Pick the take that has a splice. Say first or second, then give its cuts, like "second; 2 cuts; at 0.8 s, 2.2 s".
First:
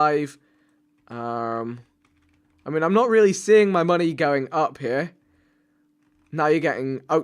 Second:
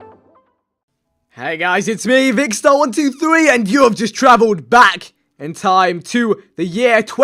first; 1 cut; at 4.2 s